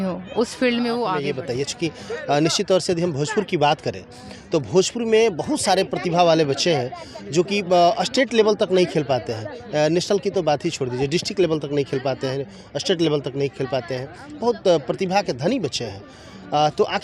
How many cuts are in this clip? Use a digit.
1